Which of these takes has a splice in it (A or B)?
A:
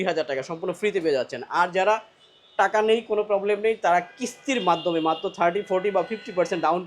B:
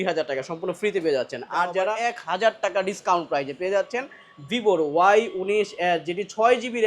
B